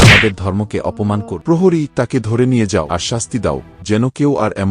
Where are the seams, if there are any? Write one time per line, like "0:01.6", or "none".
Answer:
0:01.3
0:02.9